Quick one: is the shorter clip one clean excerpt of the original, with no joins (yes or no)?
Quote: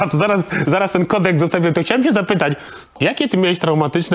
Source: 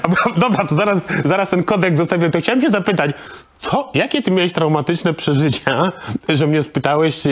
no